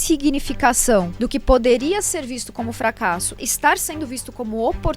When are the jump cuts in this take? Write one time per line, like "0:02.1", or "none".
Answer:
0:01.2
0:03.4